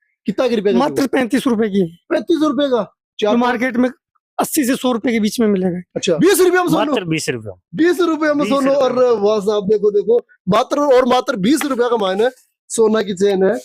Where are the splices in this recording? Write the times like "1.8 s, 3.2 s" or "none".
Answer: 6.2 s